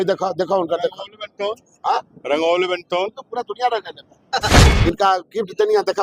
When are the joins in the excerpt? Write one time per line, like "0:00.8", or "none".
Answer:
0:04.7

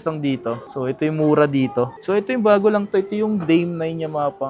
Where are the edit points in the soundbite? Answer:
0:01.9

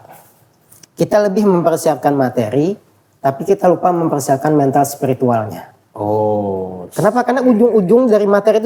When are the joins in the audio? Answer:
none

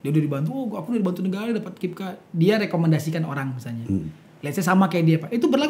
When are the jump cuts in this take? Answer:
none

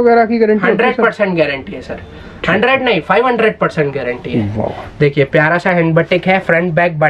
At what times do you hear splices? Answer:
none

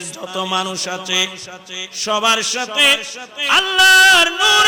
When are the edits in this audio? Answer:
none

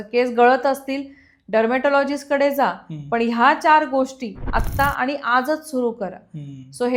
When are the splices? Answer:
none

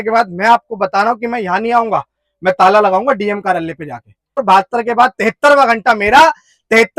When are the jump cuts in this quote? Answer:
0:04.4

